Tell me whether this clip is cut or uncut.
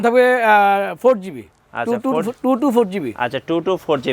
uncut